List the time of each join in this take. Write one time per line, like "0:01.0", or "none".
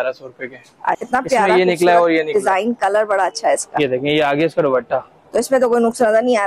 0:01.0